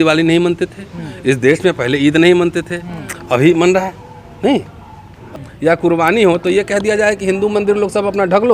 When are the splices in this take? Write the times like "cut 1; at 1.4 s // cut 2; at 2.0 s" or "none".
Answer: cut 1; at 5.2 s